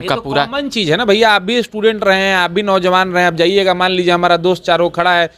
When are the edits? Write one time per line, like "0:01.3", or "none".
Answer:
none